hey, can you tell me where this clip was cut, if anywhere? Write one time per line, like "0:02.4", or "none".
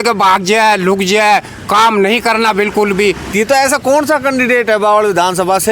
0:03.3